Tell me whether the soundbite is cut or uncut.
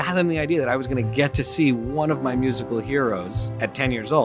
uncut